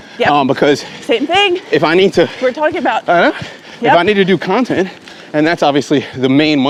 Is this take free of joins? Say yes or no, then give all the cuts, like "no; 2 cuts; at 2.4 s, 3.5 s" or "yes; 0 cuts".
yes; 0 cuts